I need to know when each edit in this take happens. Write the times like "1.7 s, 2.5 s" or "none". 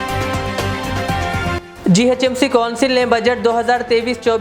1.2 s